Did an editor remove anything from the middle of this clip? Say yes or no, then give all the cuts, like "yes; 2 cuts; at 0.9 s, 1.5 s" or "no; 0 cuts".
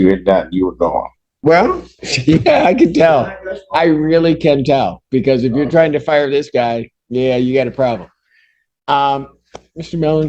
yes; 1 cut; at 1.2 s